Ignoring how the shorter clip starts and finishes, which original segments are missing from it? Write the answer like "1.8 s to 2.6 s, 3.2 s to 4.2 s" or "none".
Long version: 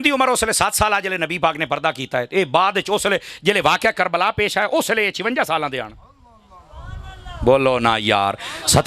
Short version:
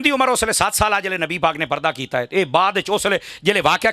none